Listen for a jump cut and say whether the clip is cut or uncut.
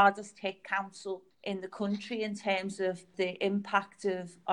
cut